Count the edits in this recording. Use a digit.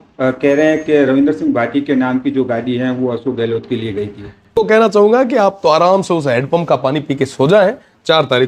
1